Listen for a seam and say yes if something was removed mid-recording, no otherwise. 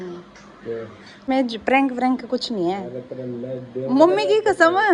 yes